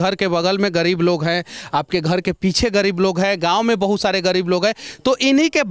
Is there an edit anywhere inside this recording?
no; 0 cuts

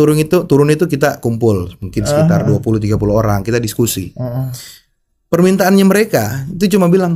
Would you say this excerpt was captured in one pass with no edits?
yes; 0 cuts

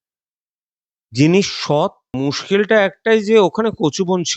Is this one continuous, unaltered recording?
no; 1 cut; at 2.2 s

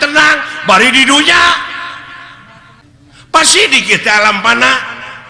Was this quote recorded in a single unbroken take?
yes; 0 cuts

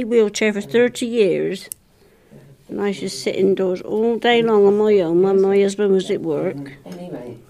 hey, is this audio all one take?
yes; 0 cuts

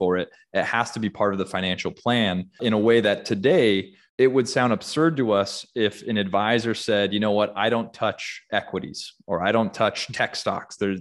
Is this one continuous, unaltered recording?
no; 2 cuts; at 2.6 s, 4.0 s

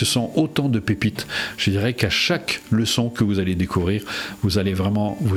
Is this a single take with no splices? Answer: yes; 0 cuts

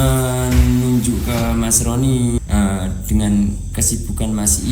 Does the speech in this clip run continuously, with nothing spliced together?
no; 1 cut; at 2.4 s

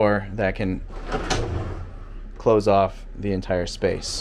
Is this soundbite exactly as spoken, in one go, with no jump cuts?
yes; 0 cuts

